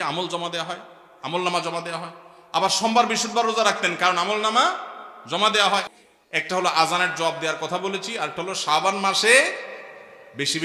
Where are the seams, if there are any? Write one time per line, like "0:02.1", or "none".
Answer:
0:05.9